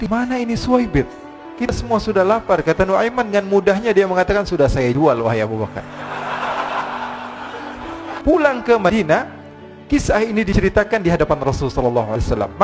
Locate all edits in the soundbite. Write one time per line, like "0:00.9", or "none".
0:08.2